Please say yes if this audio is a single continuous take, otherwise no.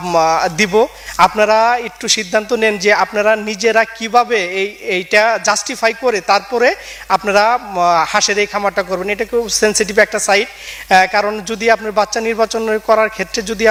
yes